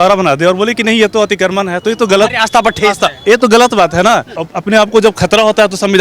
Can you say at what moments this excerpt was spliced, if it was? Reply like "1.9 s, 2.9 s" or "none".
4.4 s